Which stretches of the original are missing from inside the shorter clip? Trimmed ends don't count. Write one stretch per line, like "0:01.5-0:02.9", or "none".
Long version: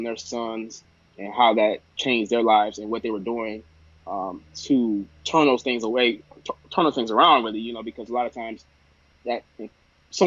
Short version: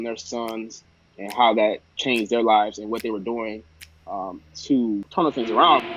0:05.1-0:06.7